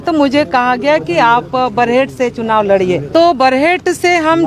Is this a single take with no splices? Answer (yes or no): no